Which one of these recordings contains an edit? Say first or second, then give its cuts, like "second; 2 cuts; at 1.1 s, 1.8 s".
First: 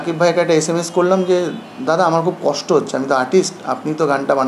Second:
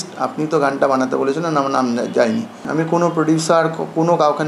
second; 1 cut; at 2.6 s